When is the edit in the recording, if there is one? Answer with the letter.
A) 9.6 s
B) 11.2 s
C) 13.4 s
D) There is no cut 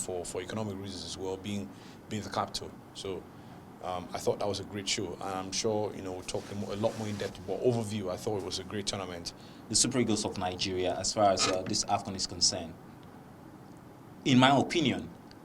A